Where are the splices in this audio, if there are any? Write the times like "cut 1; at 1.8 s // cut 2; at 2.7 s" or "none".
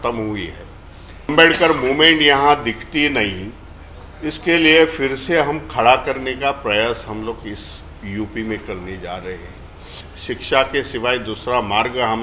cut 1; at 1.3 s // cut 2; at 9.9 s